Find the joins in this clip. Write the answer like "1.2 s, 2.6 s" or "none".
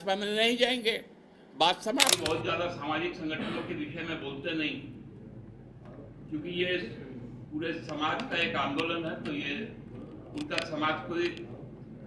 2.2 s